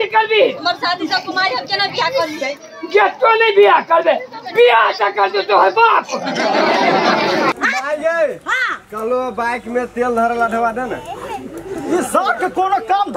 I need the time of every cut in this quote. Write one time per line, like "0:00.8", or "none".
0:07.5